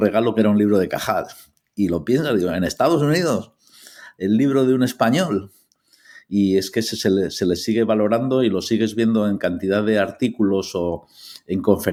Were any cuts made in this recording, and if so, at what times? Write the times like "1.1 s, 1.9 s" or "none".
none